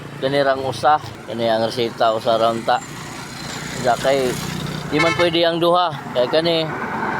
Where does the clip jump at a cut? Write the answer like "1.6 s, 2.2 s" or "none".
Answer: 1.2 s